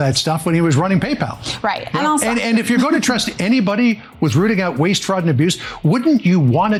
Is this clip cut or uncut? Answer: uncut